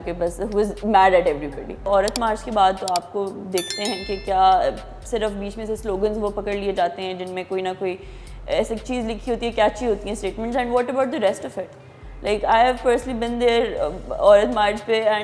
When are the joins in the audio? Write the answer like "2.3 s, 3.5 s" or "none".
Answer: 1.8 s